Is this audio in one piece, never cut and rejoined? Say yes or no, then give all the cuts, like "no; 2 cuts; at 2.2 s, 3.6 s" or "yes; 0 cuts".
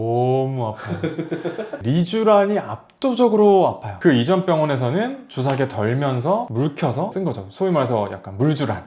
no; 2 cuts; at 1.7 s, 3.9 s